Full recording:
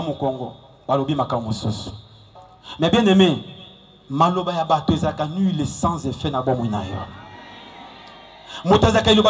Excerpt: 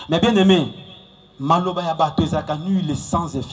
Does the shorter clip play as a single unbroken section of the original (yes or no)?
yes